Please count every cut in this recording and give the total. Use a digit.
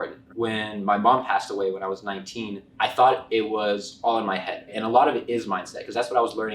2